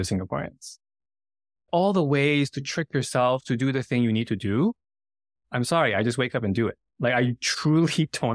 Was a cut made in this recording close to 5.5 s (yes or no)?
no